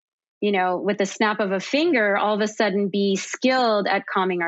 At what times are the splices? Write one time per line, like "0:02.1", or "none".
none

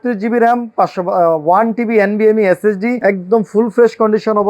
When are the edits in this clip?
0:03.0

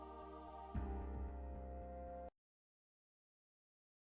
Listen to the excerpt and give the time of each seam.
none

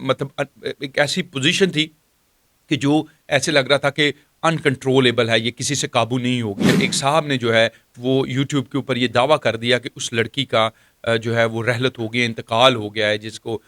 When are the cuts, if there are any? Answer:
0:06.7

